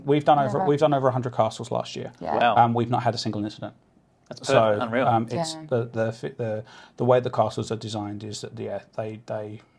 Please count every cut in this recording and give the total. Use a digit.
0